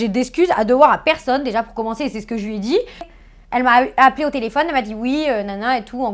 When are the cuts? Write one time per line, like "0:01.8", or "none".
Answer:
0:03.1